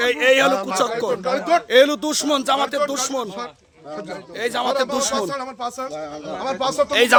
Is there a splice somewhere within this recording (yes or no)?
no